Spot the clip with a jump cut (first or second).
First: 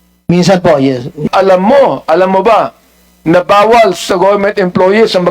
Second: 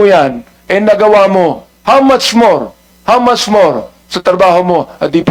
first